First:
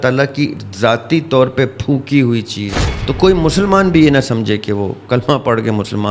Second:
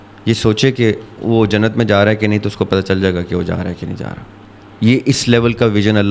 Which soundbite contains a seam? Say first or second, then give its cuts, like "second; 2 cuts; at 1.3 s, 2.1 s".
first; 1 cut; at 2.9 s